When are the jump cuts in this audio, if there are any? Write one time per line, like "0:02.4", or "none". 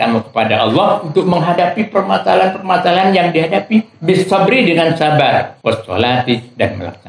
0:05.5